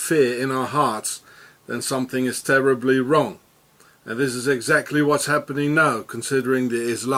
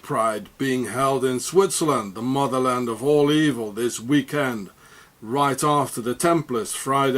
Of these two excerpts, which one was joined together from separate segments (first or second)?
second